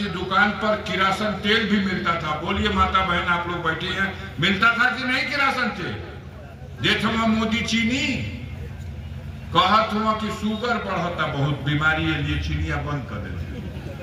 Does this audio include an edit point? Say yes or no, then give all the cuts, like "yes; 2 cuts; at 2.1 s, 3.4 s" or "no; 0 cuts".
no; 0 cuts